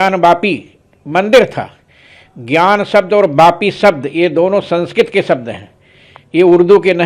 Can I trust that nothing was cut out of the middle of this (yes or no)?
yes